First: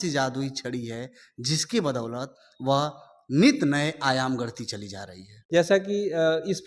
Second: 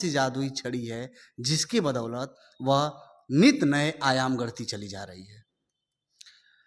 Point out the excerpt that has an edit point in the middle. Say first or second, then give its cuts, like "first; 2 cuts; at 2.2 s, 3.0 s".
first; 1 cut; at 5.3 s